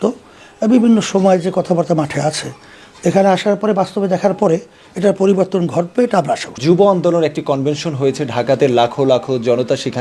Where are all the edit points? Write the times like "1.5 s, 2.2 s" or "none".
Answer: none